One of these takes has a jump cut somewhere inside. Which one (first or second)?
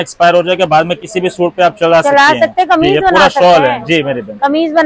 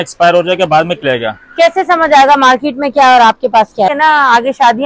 second